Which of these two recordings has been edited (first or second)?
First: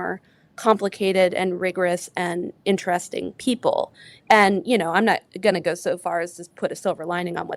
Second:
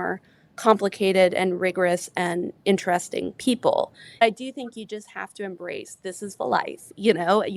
second